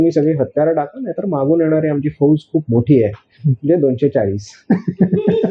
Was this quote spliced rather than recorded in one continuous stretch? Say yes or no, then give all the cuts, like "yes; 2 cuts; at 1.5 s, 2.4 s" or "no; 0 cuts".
no; 0 cuts